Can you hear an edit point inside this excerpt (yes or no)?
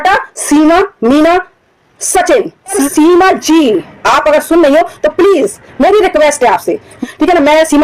yes